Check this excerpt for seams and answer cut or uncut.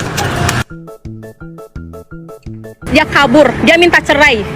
cut